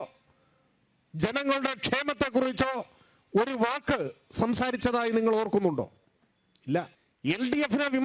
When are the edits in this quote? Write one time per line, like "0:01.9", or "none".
0:07.0